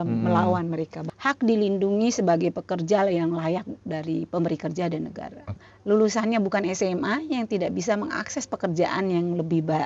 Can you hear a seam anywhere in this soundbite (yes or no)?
yes